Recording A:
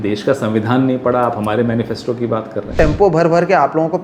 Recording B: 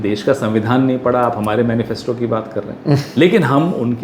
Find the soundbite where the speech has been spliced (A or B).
A